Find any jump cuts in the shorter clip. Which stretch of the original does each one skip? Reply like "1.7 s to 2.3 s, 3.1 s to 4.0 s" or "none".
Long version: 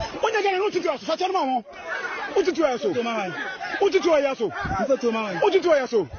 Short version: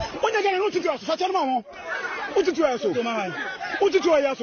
none